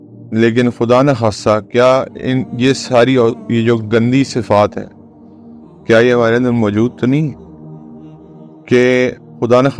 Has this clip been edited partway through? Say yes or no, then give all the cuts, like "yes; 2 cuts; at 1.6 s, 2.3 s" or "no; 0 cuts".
no; 0 cuts